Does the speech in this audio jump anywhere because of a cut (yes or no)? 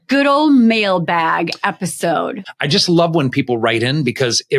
yes